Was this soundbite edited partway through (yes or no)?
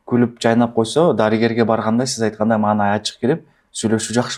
no